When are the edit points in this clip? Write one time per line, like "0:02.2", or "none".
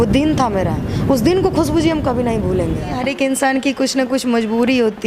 0:02.9